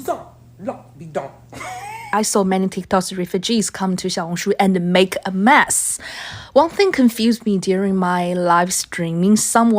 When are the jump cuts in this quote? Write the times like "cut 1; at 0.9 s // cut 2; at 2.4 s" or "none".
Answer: cut 1; at 2.1 s